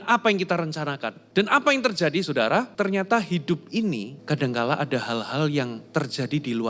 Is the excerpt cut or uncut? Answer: cut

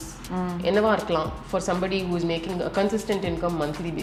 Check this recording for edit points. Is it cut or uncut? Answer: uncut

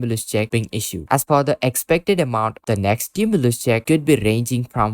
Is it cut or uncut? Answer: cut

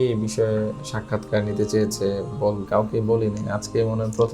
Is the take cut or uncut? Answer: cut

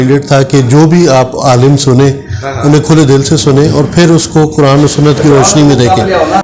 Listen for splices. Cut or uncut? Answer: uncut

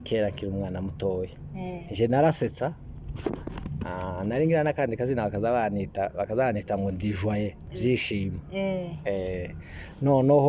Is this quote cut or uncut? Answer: cut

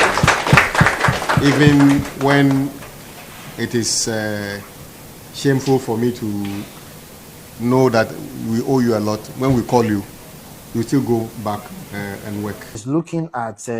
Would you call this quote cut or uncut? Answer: cut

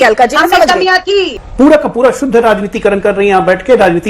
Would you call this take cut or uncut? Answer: cut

